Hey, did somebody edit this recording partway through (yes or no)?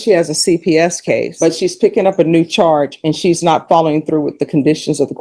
no